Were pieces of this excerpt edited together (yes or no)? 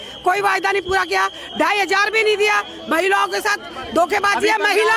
no